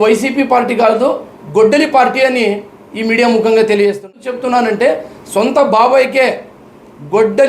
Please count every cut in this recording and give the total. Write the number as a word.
one